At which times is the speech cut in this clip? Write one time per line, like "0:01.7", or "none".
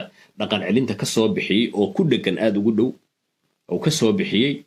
none